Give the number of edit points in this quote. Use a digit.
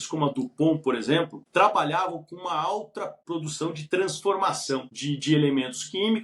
3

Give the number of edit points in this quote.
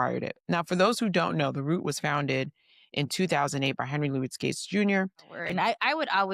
1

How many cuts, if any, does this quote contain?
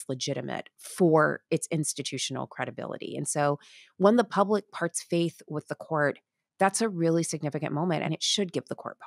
1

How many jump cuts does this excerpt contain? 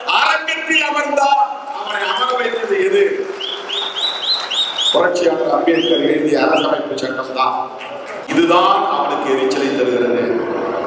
1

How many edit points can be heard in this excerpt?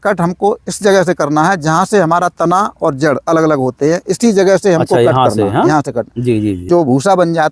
1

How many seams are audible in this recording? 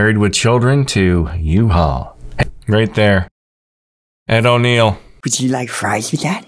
1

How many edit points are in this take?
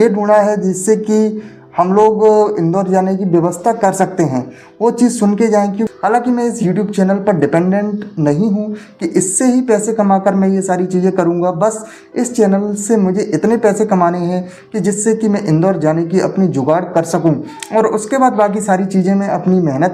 1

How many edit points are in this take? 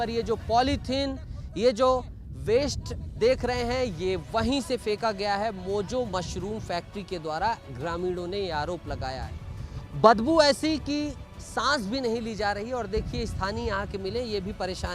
1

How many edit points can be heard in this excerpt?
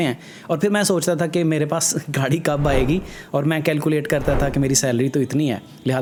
0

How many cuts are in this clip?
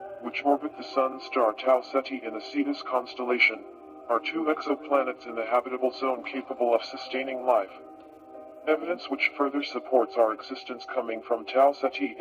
1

